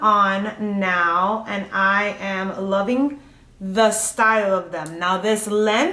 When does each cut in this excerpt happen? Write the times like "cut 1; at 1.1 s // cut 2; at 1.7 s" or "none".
none